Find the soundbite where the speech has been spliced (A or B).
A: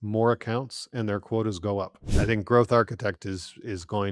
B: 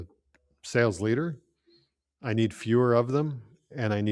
A